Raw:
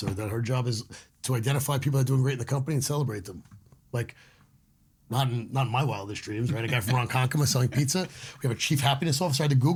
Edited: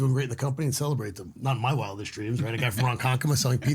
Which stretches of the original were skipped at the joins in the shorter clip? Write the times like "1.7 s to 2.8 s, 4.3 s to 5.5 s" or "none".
3.5 s to 5.5 s